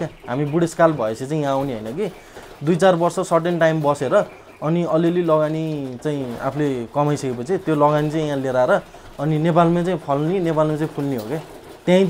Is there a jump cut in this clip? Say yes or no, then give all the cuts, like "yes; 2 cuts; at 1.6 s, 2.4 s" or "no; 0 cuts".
no; 0 cuts